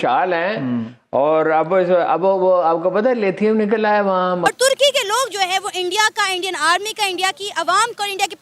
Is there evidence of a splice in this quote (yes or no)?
yes